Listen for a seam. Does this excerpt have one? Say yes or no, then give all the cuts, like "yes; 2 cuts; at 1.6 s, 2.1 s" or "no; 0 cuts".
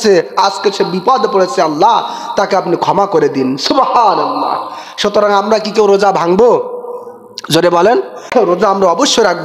yes; 1 cut; at 8.3 s